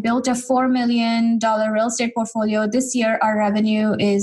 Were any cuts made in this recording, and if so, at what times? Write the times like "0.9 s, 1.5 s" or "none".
none